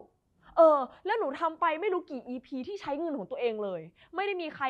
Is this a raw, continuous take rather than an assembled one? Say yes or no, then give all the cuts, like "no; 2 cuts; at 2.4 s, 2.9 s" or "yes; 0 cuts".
yes; 0 cuts